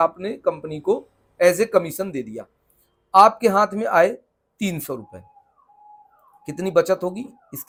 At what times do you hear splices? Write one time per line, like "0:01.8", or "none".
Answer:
none

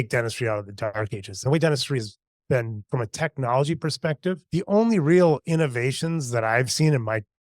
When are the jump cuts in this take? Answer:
0:00.9

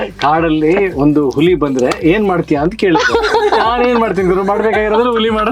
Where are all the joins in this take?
none

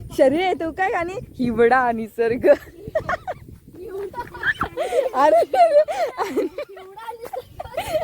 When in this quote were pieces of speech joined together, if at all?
0:03.3

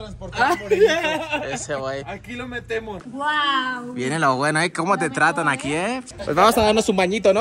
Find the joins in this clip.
0:02.9
0:06.1

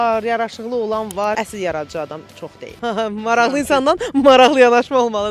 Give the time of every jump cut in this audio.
0:01.1

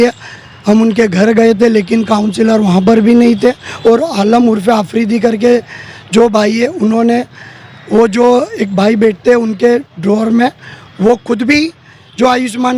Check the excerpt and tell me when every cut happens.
0:03.7

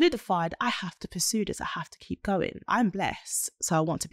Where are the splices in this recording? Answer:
0:02.6

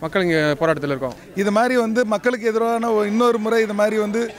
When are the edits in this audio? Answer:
0:01.2

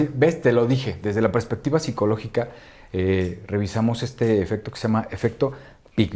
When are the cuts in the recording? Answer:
0:00.9

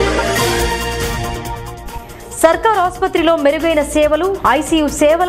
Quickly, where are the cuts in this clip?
none

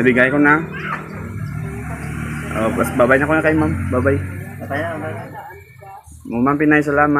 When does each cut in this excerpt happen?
none

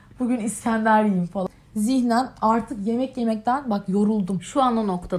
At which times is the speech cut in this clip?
0:01.4

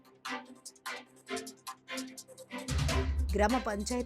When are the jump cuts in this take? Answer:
0:01.0

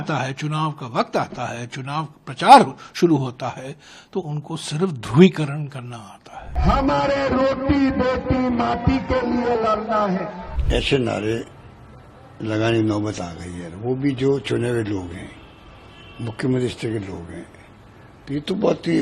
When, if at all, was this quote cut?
0:06.5
0:10.6

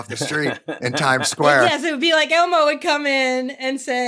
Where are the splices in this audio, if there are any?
0:01.6

